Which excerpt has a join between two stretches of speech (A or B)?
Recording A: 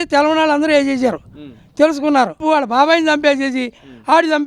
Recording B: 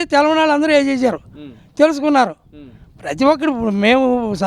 A